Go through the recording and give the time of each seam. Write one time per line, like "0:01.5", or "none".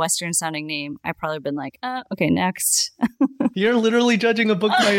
none

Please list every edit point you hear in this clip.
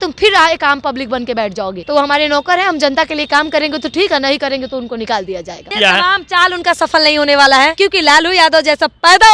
0:01.8
0:05.7
0:07.7

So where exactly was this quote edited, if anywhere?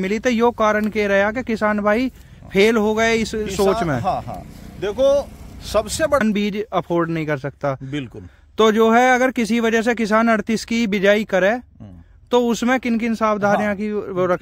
0:06.2

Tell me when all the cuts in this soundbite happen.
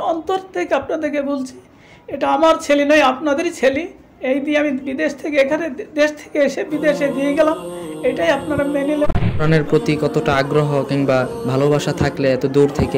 0:09.4

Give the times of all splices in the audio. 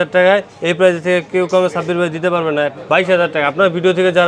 0:02.8

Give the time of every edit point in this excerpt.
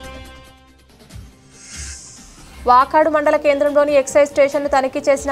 0:02.4

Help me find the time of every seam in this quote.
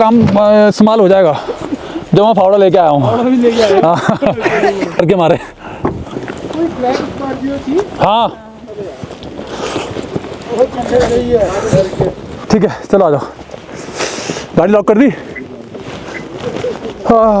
none

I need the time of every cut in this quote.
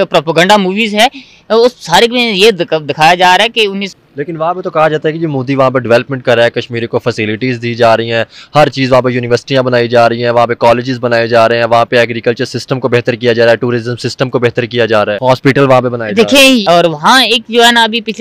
0:03.8
0:15.2
0:16.6

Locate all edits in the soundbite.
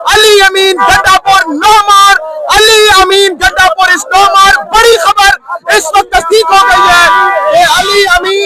none

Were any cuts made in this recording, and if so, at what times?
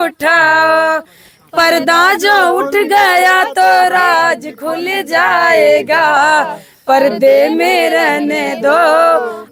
none

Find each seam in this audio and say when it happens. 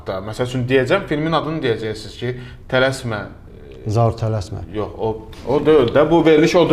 none

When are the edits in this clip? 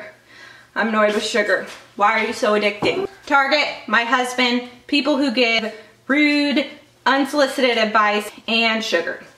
0:03.0
0:05.6
0:08.3

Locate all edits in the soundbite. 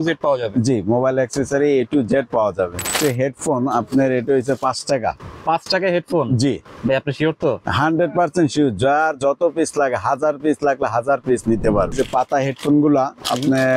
0:02.9
0:11.9

